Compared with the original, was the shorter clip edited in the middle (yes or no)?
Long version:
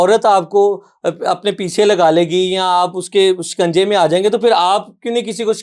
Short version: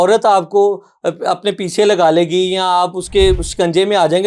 no